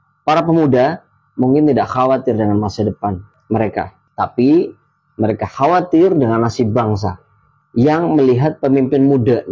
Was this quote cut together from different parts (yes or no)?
no